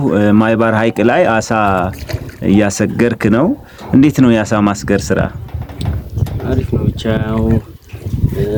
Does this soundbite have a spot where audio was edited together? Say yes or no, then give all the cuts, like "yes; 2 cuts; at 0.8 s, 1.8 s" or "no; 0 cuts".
no; 0 cuts